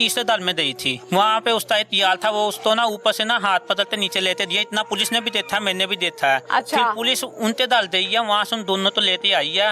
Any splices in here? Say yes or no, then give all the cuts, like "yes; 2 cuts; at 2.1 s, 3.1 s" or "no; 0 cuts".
yes; 1 cut; at 0.9 s